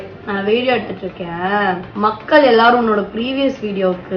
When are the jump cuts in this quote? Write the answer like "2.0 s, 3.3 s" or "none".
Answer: 1.9 s